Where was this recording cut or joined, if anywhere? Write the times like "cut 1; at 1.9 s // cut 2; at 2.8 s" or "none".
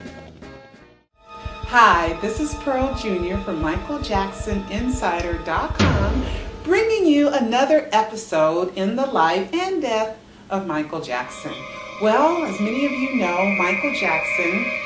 cut 1; at 12.0 s